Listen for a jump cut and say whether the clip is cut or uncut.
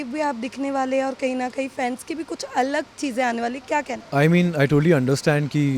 uncut